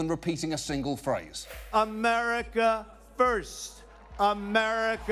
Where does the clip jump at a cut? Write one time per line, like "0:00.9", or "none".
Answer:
0:01.6